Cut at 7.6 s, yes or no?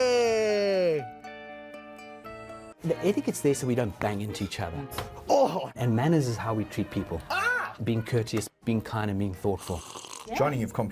no